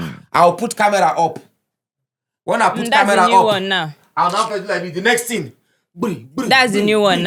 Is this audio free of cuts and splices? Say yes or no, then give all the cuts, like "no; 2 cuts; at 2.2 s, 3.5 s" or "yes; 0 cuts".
yes; 0 cuts